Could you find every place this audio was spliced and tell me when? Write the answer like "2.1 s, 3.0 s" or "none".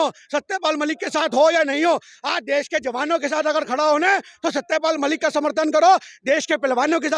none